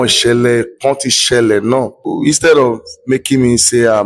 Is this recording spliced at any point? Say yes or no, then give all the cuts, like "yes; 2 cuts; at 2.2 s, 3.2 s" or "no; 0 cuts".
yes; 1 cut; at 2.0 s